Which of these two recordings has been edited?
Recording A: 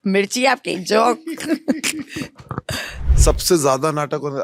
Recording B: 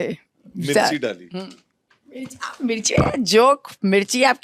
A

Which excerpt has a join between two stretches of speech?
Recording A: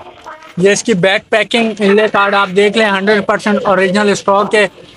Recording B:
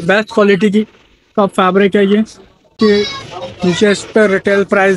B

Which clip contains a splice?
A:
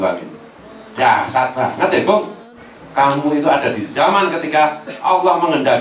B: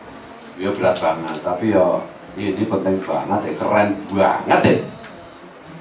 A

